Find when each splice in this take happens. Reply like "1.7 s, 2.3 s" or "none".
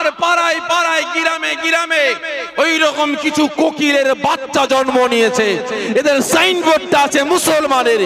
none